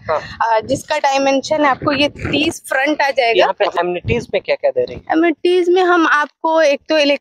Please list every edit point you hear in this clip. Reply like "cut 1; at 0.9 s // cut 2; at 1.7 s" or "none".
cut 1; at 3.5 s